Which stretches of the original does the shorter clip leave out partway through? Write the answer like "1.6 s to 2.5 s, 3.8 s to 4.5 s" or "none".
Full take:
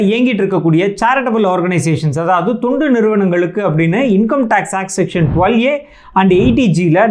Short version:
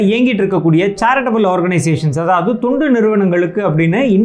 none